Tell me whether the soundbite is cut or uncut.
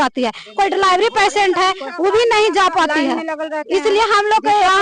uncut